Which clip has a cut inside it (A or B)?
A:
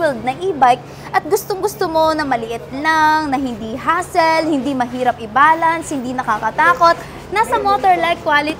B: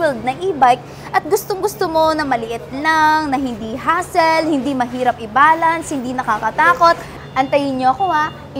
B